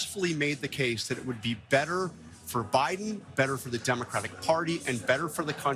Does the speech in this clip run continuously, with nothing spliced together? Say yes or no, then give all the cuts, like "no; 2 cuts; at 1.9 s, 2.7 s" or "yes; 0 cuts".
yes; 0 cuts